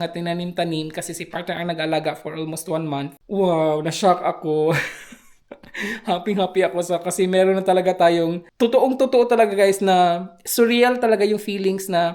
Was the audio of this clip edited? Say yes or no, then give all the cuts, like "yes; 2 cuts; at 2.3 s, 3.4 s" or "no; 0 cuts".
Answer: no; 0 cuts